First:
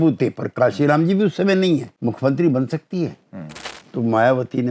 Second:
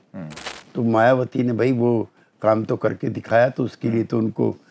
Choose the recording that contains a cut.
first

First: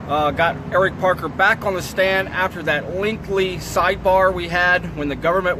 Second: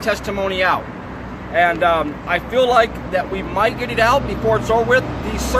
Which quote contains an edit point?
first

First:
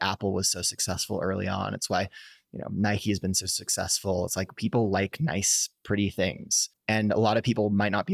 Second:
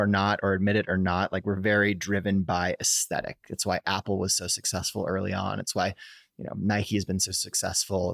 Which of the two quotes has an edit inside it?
first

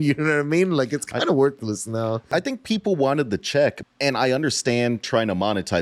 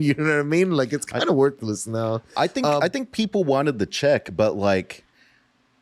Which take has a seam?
first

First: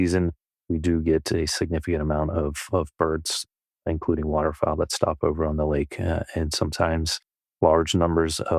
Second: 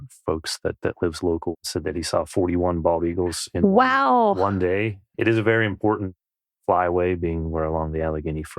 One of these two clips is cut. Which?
second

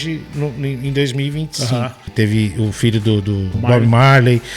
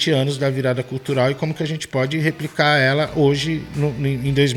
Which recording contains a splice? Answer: first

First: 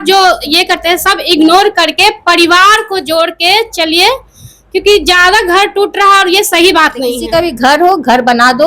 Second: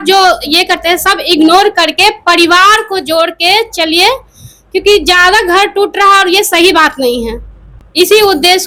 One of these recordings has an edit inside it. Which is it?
first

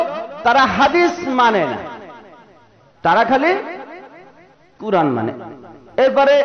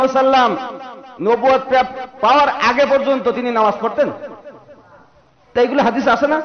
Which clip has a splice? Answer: first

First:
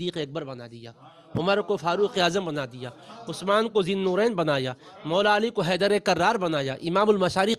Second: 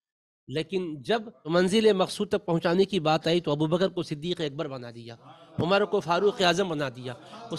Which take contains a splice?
second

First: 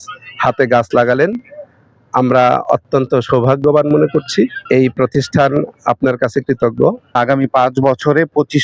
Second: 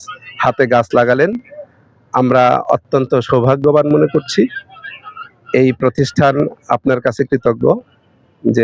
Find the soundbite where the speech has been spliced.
first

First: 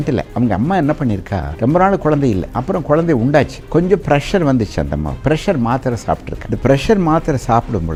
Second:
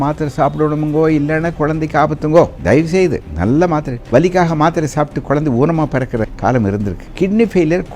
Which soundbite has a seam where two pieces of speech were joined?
second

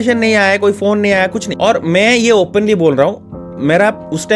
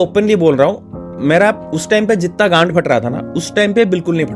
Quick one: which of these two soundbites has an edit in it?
first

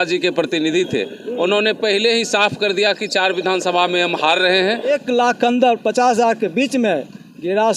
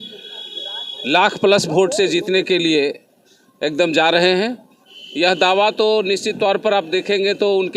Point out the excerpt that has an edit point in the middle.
first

